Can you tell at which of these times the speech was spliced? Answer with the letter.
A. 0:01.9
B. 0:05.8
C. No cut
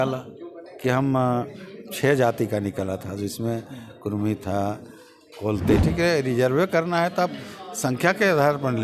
B